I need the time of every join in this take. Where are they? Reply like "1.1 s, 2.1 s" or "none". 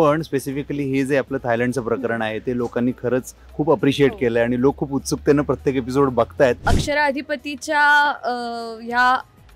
6.7 s

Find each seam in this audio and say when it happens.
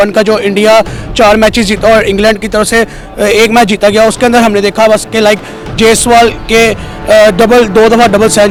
none

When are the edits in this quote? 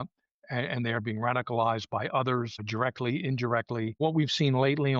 2.6 s, 4.0 s

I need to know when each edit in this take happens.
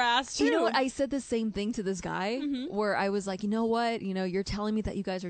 none

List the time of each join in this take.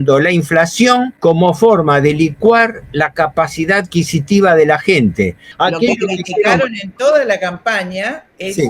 1.1 s, 5.5 s

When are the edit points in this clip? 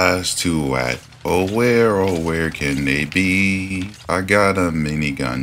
3.9 s

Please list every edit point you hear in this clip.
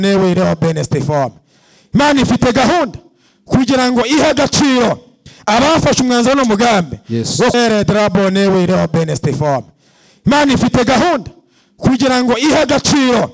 7.5 s

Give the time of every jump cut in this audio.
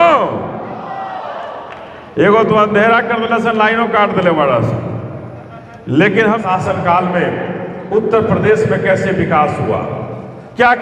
6.4 s

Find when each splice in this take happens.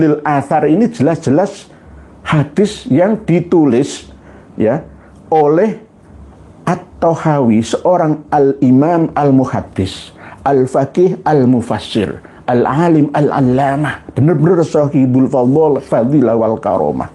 none

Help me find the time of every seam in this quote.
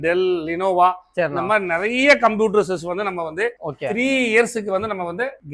none

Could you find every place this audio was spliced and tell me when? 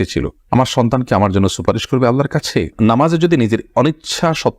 2.7 s

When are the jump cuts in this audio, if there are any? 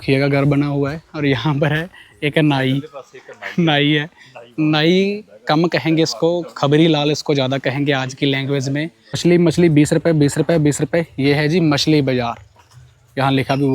9.2 s

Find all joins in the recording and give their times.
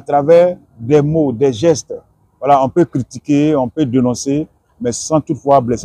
none

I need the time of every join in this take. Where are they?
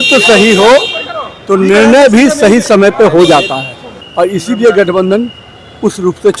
4.0 s

